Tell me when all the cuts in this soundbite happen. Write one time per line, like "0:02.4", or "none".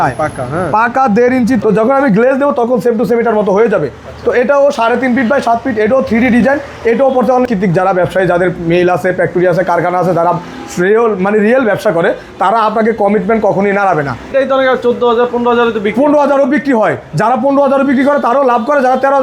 0:01.6
0:07.5
0:14.3